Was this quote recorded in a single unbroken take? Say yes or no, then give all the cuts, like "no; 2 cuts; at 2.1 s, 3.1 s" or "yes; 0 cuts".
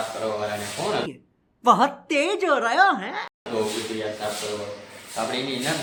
yes; 0 cuts